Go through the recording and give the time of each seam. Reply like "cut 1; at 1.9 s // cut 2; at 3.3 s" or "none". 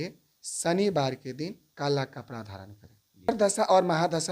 cut 1; at 3.3 s